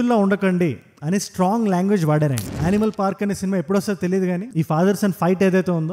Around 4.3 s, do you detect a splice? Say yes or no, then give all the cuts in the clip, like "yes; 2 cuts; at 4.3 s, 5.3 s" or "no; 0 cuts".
no; 1 cut; at 2.6 s